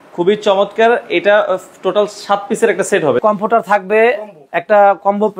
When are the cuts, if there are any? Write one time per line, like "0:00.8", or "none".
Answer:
0:03.2

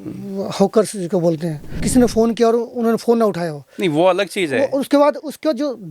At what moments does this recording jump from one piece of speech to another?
0:01.8

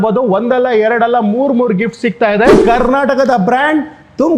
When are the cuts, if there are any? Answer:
0:02.6

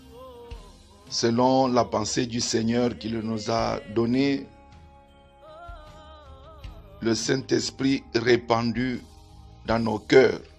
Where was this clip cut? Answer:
0:01.2
0:04.5
0:07.0

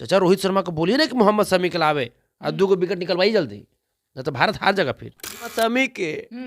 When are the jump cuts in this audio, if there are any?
0:05.5

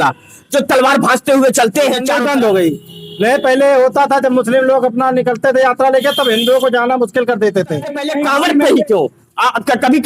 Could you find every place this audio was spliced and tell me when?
0:02.1
0:08.1

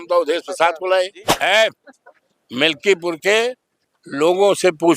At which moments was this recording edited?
0:01.3

